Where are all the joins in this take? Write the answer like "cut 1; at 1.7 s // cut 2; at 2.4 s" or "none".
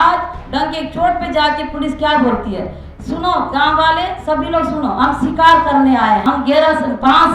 cut 1; at 6.2 s